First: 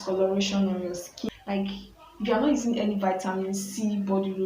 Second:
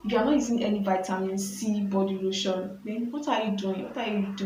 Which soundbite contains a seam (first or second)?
first